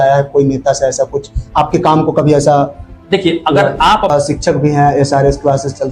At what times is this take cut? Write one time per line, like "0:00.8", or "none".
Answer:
0:04.1